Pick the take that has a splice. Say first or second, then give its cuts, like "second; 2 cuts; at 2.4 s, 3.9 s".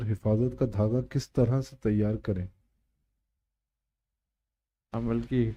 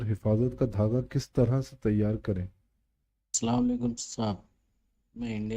second; 1 cut; at 3.4 s